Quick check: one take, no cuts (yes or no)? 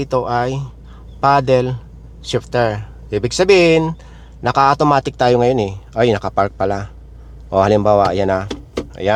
yes